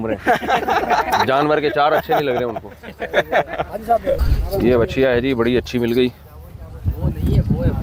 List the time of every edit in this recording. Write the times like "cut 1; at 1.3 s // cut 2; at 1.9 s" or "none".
none